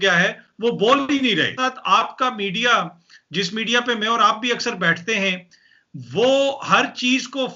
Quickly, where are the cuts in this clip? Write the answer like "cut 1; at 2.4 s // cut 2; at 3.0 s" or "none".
none